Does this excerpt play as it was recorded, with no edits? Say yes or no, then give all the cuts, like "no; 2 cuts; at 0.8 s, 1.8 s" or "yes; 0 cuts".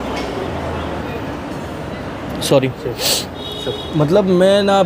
no; 1 cut; at 1.1 s